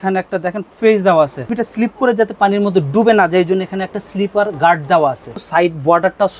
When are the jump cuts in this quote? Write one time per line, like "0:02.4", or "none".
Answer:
0:01.6
0:05.3